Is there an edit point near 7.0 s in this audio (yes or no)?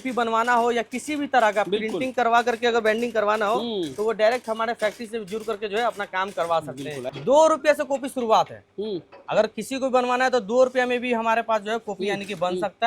yes